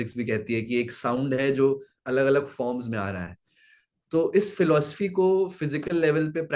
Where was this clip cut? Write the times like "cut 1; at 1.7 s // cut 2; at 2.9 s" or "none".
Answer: none